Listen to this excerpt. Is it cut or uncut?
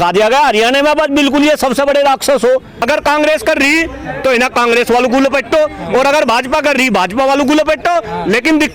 cut